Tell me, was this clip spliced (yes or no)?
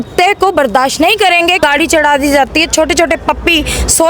yes